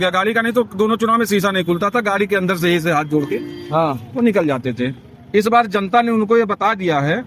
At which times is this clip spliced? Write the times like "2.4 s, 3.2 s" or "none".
none